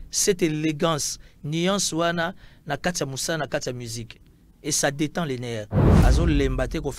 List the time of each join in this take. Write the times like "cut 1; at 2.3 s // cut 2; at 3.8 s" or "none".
cut 1; at 5.8 s